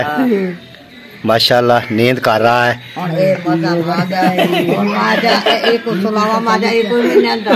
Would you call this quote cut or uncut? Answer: uncut